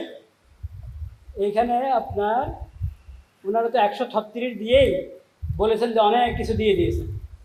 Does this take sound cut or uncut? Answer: uncut